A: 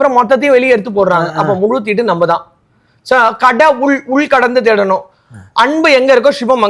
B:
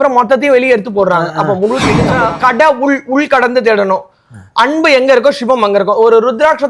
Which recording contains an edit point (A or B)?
B